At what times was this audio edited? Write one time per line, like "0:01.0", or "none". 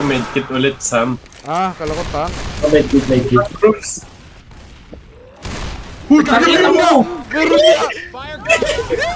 none